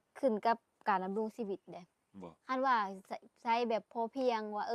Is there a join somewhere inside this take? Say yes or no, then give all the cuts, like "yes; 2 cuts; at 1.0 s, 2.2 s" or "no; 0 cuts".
no; 0 cuts